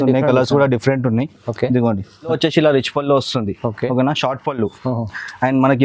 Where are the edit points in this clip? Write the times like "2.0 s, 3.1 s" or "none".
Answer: 2.3 s